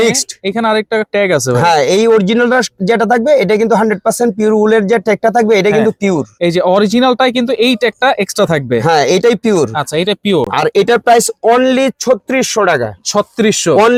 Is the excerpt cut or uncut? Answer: uncut